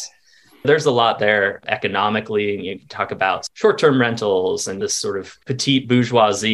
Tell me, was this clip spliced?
yes; 2 cuts; at 3.5 s, 4.9 s

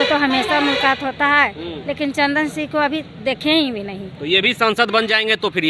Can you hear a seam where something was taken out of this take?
no; 0 cuts

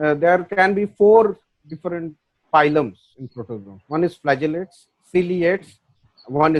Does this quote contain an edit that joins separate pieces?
no; 0 cuts

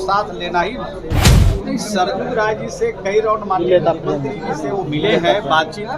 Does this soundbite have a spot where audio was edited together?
yes; 1 cut; at 1.3 s

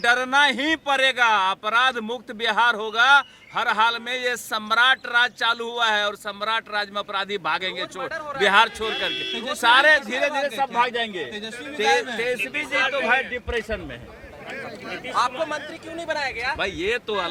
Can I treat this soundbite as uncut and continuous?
yes; 0 cuts

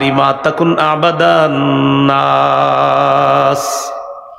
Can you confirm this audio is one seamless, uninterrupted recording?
yes; 0 cuts

